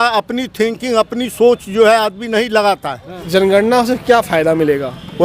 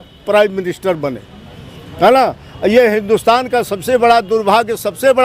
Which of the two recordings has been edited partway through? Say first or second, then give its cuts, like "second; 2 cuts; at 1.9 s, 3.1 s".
first; 1 cut; at 3.2 s